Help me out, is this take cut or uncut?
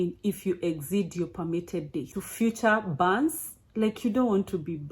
cut